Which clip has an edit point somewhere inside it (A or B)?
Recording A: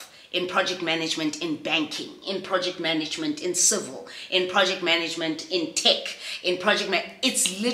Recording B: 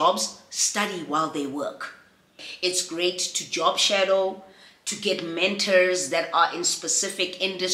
B